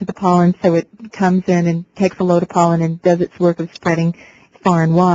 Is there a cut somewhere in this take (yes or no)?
yes